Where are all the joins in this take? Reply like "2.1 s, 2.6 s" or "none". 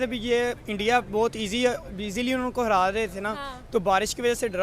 none